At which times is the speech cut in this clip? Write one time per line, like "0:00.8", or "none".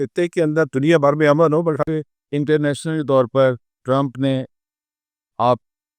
0:01.8